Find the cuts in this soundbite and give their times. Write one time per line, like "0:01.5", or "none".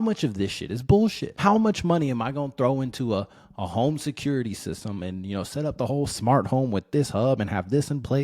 0:01.3